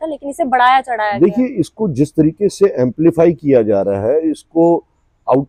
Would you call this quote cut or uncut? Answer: uncut